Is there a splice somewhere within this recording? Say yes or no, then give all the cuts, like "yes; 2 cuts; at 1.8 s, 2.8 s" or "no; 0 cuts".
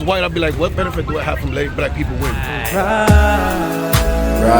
yes; 1 cut; at 2.6 s